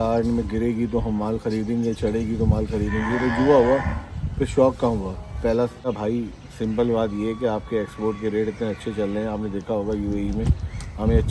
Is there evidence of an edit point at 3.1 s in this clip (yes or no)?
no